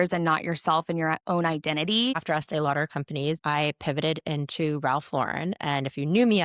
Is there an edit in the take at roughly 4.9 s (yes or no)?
no